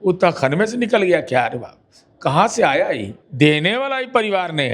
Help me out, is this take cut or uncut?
cut